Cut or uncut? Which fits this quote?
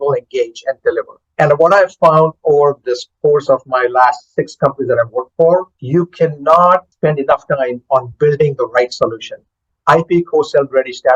cut